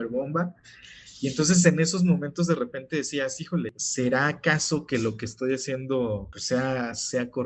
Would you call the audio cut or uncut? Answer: cut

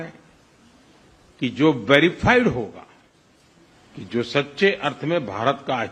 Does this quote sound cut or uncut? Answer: uncut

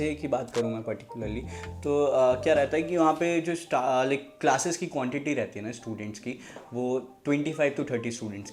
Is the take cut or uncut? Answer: uncut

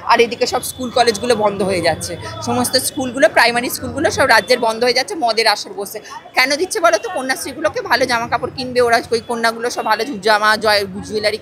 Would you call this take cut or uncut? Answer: uncut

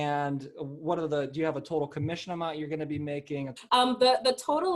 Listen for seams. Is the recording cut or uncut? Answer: cut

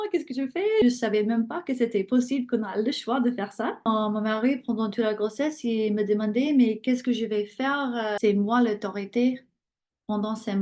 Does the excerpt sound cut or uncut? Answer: cut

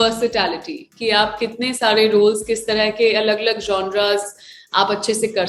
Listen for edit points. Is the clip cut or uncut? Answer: uncut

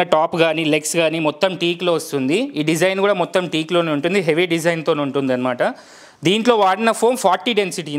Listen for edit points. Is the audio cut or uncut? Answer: uncut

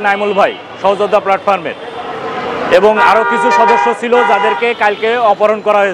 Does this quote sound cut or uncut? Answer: uncut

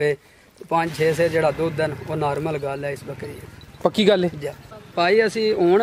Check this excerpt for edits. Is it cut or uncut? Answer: cut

